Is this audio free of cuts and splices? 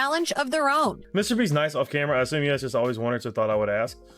no; 1 cut; at 1.1 s

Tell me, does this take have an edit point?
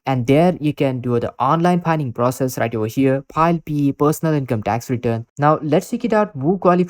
yes; 1 cut; at 5.2 s

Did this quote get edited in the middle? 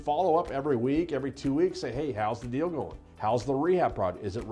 no; 0 cuts

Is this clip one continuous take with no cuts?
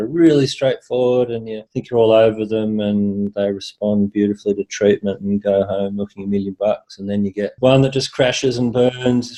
yes; 0 cuts

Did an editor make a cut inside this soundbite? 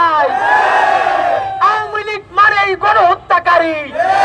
no; 0 cuts

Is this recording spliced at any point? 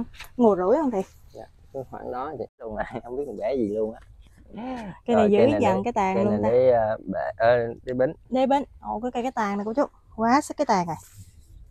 yes; 1 cut; at 2.7 s

